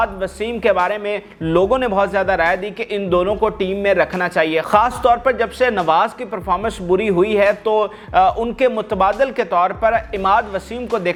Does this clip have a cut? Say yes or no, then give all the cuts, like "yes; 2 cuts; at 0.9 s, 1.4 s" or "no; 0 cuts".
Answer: no; 0 cuts